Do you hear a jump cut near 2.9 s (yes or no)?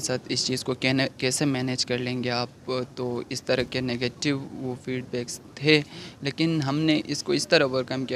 no